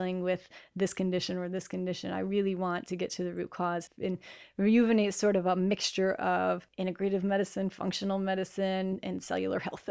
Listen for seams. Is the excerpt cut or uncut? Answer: cut